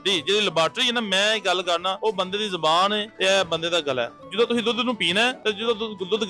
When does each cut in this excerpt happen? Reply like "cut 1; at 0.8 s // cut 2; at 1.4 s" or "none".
cut 1; at 2.0 s // cut 2; at 3.1 s // cut 3; at 4.2 s // cut 4; at 5.4 s